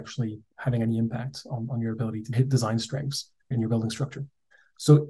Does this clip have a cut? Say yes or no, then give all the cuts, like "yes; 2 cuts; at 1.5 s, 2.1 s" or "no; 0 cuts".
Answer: yes; 2 cuts; at 2.3 s, 3.5 s